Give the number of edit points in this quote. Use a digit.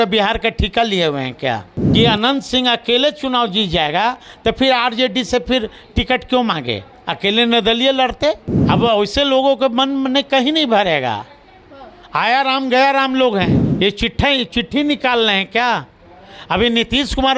3